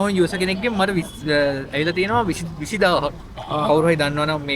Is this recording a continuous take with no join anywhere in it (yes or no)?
yes